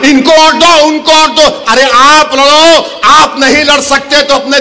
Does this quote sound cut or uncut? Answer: uncut